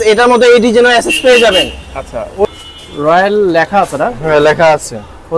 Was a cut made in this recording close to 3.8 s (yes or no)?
no